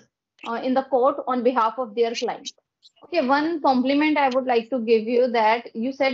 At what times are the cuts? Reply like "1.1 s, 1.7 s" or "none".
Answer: 3.1 s